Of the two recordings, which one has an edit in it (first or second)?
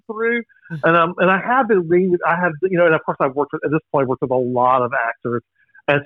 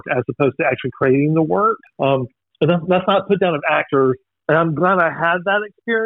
second